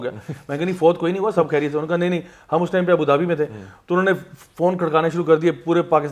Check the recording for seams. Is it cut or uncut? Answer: uncut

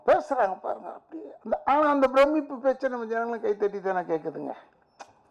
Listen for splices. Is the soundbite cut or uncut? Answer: uncut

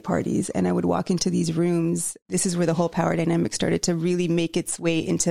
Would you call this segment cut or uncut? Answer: cut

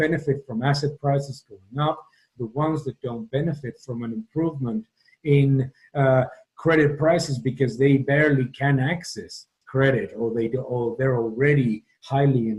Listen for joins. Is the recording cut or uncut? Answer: uncut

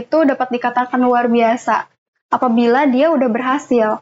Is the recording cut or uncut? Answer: uncut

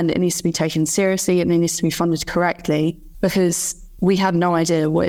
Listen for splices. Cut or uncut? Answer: uncut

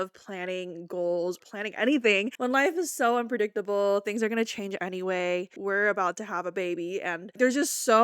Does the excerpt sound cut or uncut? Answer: cut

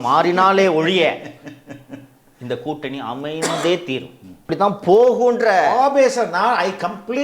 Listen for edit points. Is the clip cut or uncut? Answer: cut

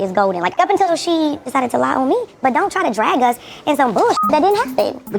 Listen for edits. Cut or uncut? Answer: uncut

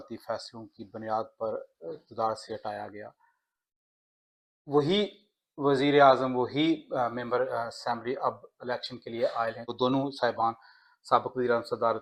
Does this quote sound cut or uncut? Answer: uncut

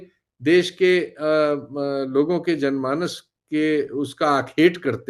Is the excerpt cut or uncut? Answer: uncut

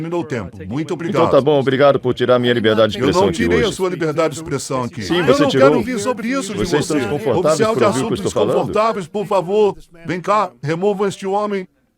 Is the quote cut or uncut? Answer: uncut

